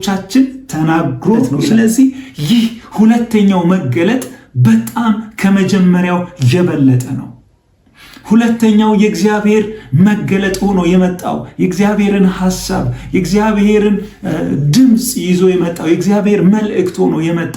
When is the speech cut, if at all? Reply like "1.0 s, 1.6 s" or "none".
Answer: 1.6 s

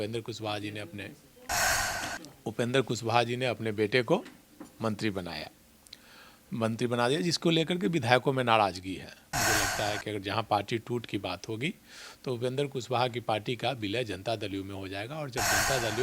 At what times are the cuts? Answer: 9.3 s

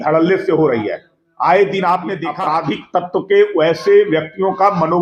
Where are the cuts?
2.3 s

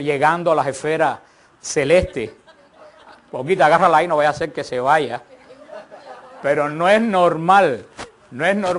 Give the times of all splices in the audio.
6.5 s

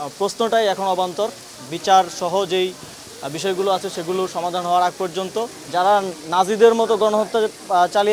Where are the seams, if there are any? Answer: 5.6 s

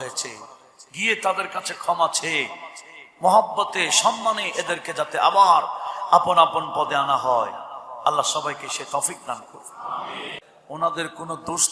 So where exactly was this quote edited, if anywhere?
10.5 s

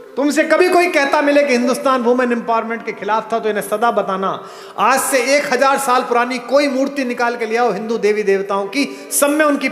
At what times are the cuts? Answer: none

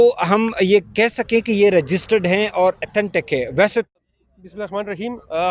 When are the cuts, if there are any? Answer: 3.9 s

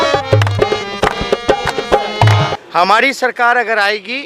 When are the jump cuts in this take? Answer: 2.6 s

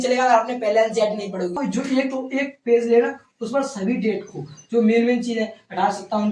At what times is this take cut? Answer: 1.6 s

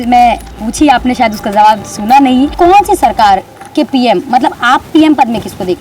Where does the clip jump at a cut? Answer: 2.5 s

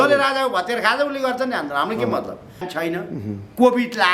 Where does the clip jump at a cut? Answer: 2.7 s

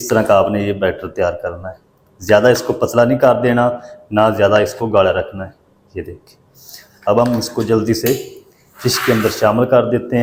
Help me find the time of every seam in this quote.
none

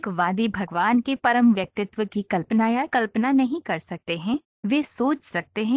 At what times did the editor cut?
2.9 s

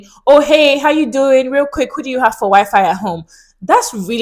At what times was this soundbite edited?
none

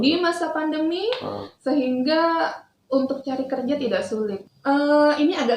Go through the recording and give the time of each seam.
4.4 s

